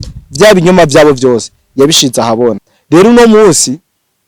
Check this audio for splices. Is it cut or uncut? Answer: cut